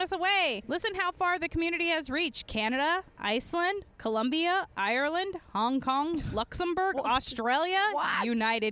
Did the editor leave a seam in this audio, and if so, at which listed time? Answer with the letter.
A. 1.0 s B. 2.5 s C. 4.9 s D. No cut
D